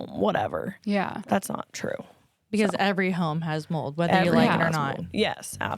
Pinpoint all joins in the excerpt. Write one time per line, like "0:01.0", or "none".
0:01.1

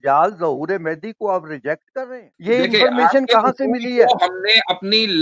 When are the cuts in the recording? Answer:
0:02.2

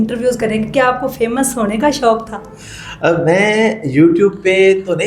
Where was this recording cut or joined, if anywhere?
none

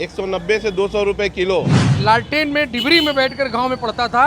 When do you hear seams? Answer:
0:01.8

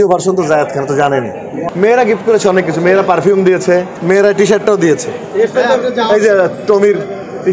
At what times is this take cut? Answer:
0:01.6
0:03.9

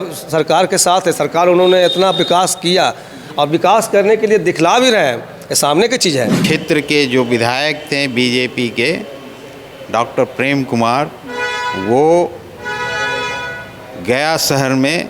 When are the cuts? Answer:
0:06.4

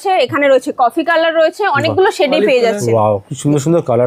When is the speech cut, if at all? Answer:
none

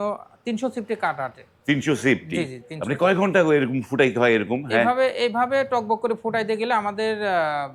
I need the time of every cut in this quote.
none

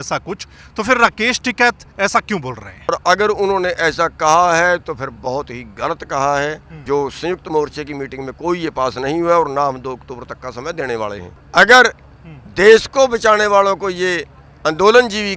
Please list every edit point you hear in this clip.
0:02.9
0:06.8
0:11.3

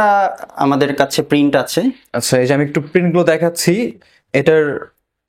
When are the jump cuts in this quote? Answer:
none

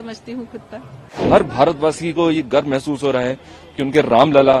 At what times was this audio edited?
0:01.2

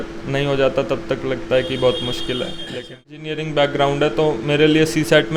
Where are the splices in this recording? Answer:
0:03.3

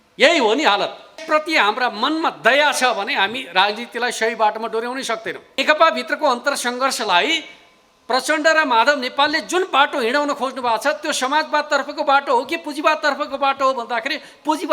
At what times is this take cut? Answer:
0:01.2
0:05.6

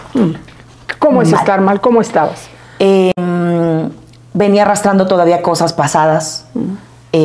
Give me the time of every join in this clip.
none

